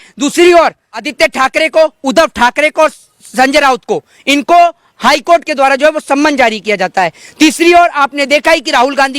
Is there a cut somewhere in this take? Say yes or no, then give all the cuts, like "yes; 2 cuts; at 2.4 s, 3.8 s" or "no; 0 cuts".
yes; 1 cut; at 1.0 s